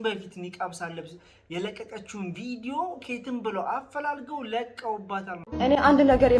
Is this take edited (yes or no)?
yes